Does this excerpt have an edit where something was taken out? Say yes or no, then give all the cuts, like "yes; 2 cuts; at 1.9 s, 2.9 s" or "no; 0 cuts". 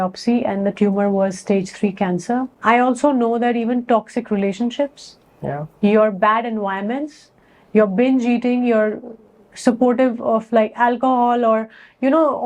yes; 1 cut; at 2.5 s